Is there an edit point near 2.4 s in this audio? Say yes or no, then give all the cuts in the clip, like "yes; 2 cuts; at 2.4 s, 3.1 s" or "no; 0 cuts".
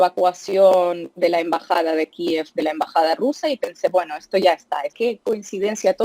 no; 1 cut; at 4.9 s